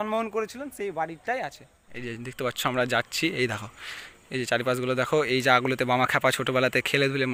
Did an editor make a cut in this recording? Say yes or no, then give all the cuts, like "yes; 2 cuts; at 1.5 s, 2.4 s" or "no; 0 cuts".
no; 0 cuts